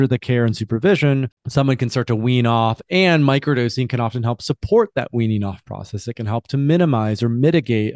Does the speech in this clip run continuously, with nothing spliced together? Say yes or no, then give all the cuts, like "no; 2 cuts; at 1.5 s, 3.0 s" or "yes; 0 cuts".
no; 1 cut; at 1.4 s